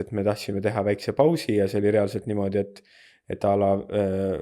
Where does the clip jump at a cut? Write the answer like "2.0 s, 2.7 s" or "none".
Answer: none

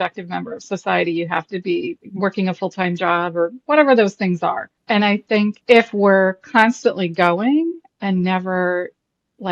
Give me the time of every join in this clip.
2.0 s, 4.7 s, 5.6 s

